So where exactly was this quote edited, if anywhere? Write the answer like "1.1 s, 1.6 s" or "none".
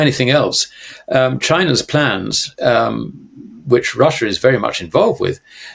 none